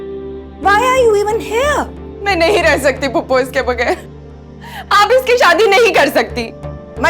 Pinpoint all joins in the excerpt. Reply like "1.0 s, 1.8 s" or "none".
none